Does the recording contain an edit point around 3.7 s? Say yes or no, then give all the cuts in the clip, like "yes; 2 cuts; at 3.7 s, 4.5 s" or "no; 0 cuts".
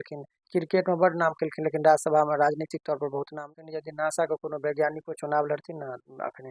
yes; 1 cut; at 3.7 s